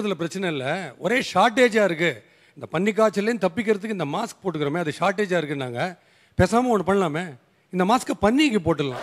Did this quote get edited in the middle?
no; 0 cuts

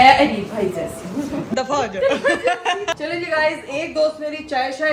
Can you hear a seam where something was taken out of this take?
no; 0 cuts

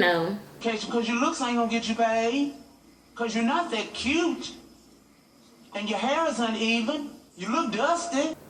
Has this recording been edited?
no; 0 cuts

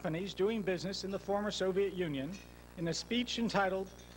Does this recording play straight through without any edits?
no; 1 cut; at 2.4 s

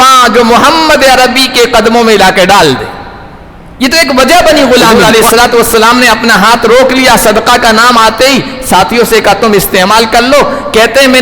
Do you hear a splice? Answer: yes; 1 cut; at 4.9 s

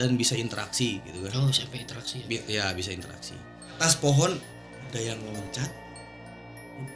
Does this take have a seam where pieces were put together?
yes; 1 cut; at 3.8 s

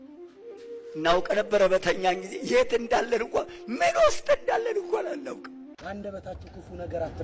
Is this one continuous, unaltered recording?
no; 1 cut; at 5.7 s

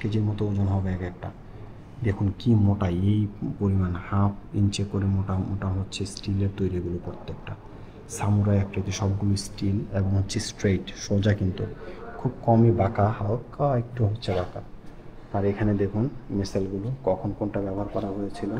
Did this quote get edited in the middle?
no; 0 cuts

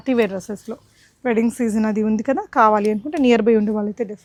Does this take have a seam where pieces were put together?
no; 0 cuts

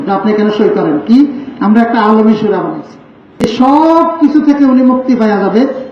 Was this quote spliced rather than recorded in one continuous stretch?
yes; 1 cut; at 3.2 s

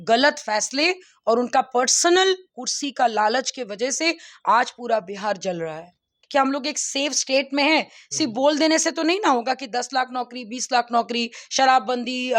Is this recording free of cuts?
no; 1 cut; at 6.2 s

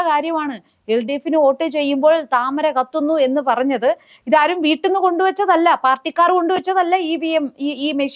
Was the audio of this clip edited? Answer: no; 0 cuts

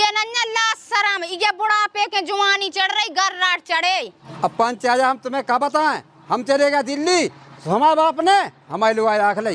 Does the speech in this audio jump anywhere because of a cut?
yes; 1 cut; at 4.2 s

